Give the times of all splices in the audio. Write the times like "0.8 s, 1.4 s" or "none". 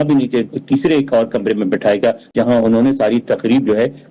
2.3 s